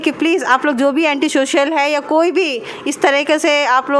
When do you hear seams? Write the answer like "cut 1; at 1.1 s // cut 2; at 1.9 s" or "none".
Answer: none